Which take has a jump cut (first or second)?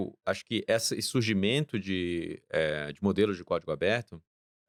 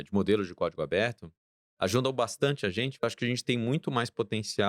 second